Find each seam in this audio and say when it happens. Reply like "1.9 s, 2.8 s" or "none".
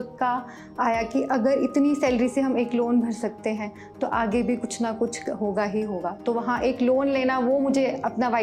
none